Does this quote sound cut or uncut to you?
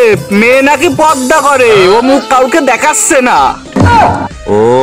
uncut